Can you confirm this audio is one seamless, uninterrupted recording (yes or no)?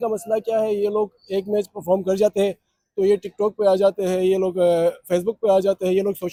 yes